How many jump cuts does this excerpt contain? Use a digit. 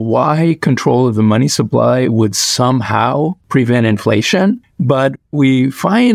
2